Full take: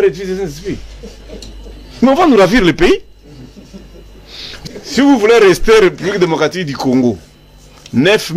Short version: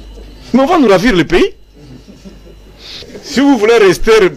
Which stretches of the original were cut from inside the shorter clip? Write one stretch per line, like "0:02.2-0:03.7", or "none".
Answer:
0:04.6-0:04.7